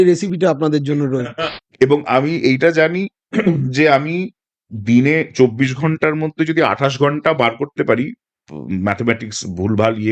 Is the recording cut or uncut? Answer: cut